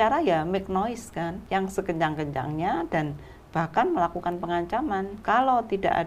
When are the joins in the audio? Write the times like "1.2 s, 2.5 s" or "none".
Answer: 1.4 s, 5.1 s